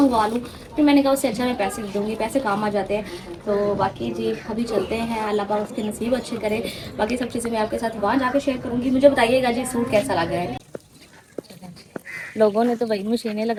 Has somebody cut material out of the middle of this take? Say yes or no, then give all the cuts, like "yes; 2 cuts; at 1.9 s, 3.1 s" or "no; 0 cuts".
no; 0 cuts